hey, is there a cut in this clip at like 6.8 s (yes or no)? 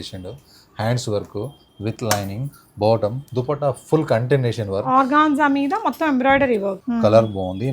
yes